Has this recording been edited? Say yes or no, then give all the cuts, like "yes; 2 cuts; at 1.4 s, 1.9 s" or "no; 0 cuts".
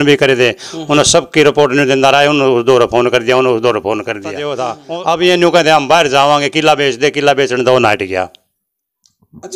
yes; 1 cut; at 4.5 s